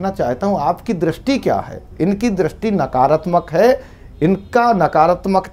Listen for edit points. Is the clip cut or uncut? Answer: uncut